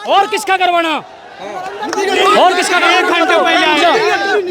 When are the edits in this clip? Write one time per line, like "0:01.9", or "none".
none